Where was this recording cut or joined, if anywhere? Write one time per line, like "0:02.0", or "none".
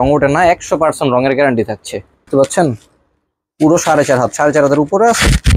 0:02.3

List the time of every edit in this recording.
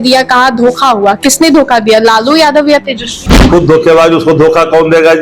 0:03.2

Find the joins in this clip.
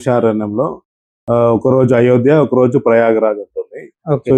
none

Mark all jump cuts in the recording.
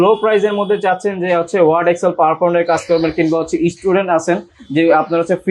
none

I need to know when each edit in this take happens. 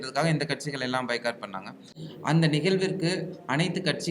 0:01.9

